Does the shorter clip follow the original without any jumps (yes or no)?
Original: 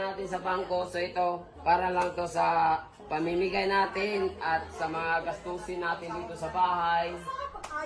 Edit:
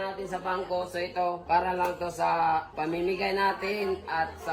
no